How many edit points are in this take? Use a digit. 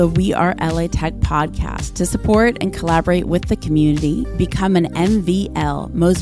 0